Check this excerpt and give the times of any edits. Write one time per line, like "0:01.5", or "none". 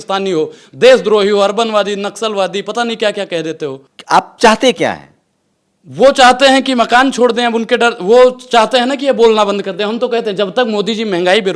none